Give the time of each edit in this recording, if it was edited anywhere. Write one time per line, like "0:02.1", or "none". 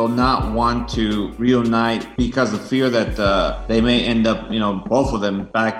0:01.3
0:02.1
0:03.6
0:04.9